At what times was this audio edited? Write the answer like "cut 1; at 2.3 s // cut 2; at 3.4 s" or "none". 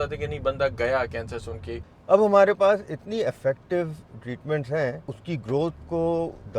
cut 1; at 1.8 s // cut 2; at 5.1 s